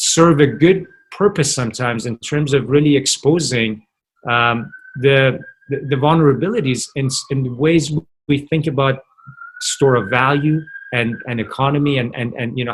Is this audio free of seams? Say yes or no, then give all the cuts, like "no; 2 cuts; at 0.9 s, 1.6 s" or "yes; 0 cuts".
yes; 0 cuts